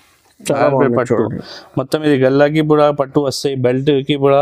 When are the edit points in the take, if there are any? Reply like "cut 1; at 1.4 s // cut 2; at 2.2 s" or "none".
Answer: none